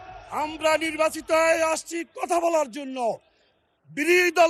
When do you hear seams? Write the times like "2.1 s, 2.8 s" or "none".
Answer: none